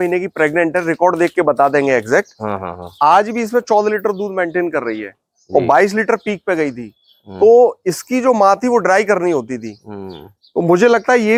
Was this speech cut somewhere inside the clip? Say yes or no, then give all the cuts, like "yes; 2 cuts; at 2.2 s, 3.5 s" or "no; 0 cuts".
no; 0 cuts